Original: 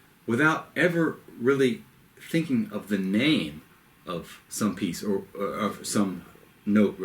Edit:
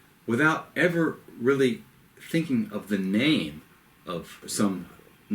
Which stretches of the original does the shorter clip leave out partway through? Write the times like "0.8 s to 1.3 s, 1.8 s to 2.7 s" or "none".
4.4 s to 5.8 s